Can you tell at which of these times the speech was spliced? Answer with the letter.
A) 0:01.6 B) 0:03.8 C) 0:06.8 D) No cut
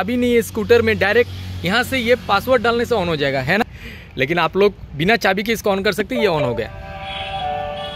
B